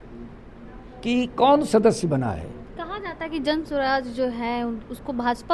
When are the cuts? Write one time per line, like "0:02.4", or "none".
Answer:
0:02.7